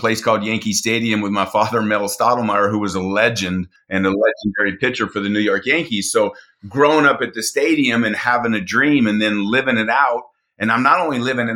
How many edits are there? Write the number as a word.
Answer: one